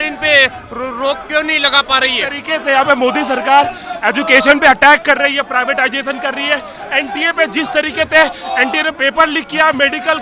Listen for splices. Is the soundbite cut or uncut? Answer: cut